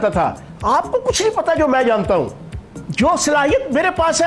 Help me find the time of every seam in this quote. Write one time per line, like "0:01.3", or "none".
0:02.8